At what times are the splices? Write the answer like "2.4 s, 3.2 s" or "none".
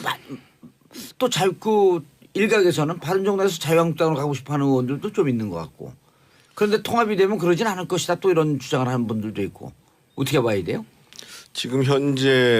6.3 s